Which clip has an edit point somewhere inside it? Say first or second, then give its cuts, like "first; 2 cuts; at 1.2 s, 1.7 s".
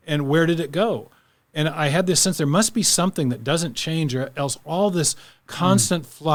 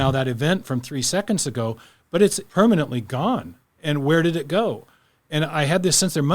second; 1 cut; at 2.4 s